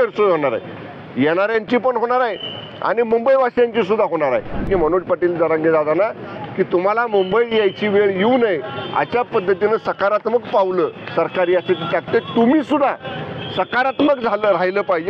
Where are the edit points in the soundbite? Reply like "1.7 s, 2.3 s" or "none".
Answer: 4.7 s